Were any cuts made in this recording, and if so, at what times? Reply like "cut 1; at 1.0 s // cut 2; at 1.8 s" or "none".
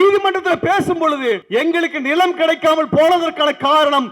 cut 1; at 1.4 s